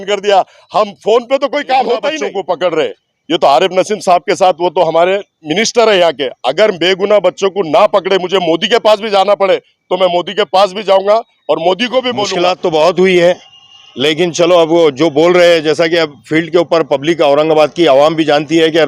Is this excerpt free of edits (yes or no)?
no